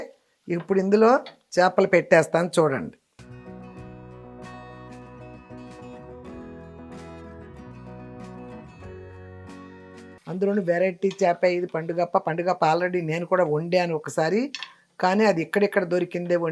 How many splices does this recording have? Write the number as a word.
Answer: one